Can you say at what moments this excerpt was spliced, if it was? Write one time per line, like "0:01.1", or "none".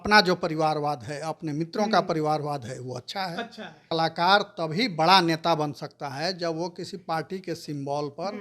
0:03.8